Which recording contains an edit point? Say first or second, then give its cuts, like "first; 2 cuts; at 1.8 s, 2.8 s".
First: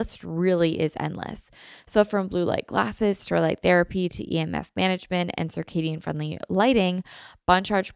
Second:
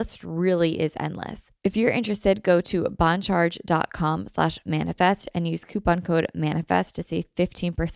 second; 1 cut; at 1.4 s